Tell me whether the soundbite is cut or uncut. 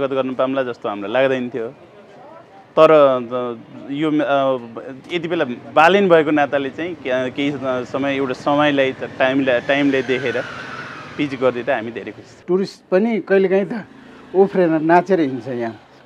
cut